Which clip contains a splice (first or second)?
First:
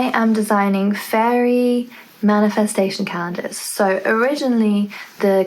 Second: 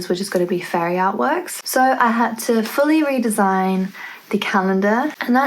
second